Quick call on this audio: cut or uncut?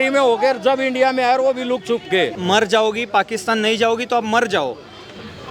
cut